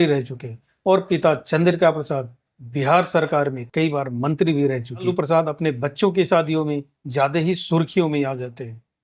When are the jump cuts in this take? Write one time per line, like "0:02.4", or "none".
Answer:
0:05.1